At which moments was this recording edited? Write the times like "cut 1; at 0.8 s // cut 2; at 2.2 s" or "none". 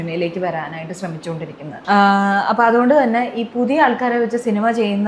cut 1; at 1.7 s